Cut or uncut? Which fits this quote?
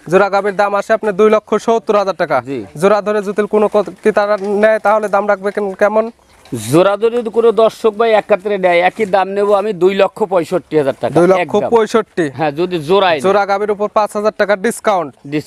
uncut